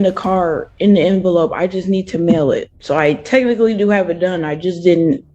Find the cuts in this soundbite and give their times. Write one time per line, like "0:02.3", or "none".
0:02.7